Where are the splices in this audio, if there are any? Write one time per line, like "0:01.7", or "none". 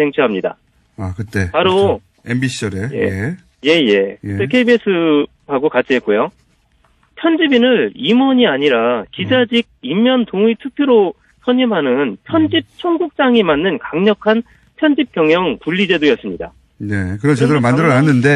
none